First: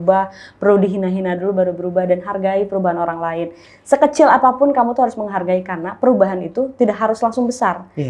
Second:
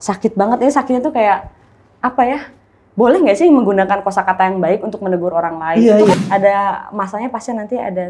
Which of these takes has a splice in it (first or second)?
second